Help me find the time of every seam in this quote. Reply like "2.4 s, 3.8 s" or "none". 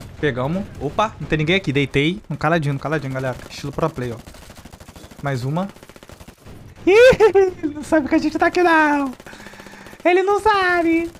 none